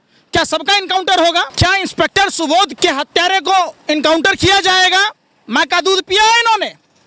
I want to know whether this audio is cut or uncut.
cut